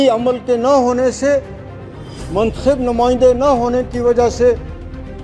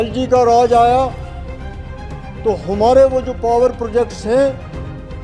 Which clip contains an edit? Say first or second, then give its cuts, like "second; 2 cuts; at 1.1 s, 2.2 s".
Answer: second; 2 cuts; at 1.1 s, 2.4 s